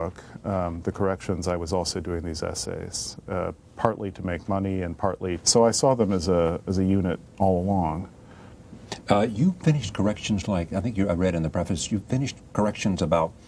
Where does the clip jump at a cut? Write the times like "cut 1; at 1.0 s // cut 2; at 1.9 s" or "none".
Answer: none